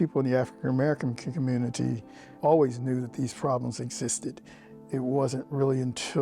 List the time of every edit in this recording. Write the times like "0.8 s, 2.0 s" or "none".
2.3 s, 4.7 s